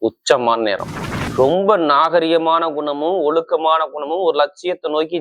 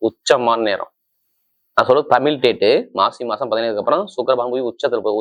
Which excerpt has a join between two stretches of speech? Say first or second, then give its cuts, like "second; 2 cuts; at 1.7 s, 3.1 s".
first; 1 cut; at 1.3 s